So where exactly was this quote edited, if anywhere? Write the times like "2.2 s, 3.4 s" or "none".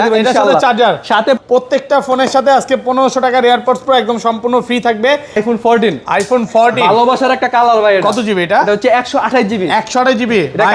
1.4 s, 5.4 s